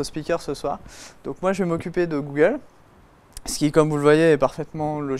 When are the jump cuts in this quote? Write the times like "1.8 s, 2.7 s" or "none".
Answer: none